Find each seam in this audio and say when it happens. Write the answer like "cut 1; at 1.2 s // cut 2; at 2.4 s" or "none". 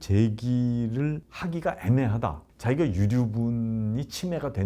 cut 1; at 2.5 s